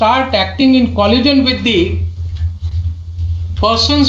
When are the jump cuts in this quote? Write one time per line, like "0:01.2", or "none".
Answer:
none